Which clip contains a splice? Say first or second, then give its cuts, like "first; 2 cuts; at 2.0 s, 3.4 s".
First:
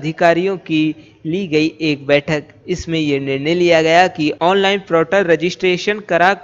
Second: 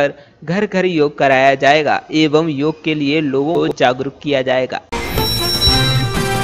second; 2 cuts; at 3.6 s, 4.9 s